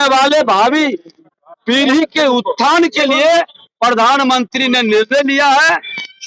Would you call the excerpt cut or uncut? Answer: uncut